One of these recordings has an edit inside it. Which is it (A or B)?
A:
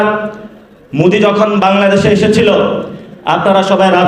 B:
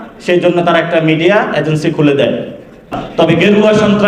B